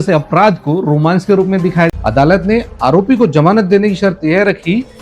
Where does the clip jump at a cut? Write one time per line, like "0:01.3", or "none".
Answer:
0:01.9